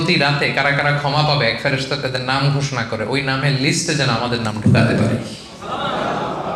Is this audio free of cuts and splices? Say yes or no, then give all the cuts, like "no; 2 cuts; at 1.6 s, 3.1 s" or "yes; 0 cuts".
yes; 0 cuts